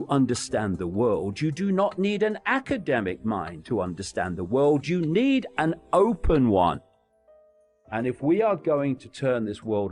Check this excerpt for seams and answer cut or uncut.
cut